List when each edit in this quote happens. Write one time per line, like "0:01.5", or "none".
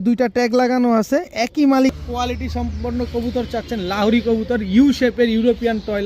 0:01.9